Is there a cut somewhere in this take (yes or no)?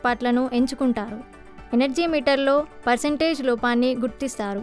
no